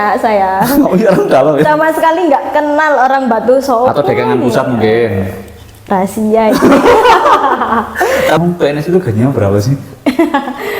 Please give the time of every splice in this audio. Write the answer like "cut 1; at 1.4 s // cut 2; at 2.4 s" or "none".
cut 1; at 8.4 s